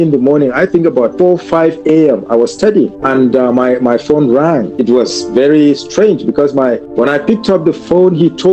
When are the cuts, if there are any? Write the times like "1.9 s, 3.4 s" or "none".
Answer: 1.1 s, 3.0 s, 4.7 s, 6.9 s